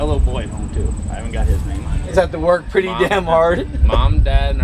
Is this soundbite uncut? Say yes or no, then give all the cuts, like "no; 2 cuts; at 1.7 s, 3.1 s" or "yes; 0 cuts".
no; 1 cut; at 2.1 s